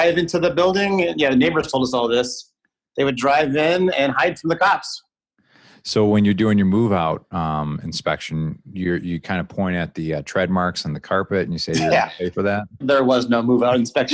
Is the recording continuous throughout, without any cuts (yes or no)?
no